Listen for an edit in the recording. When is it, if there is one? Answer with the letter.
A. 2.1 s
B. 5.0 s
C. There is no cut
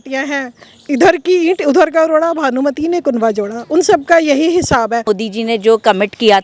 B